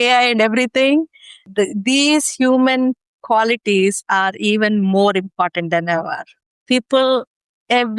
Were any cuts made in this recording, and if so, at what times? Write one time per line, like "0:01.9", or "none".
0:01.5